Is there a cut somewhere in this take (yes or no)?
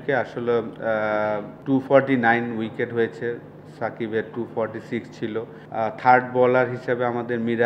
yes